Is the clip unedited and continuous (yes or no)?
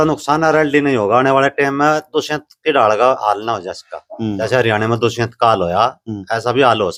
yes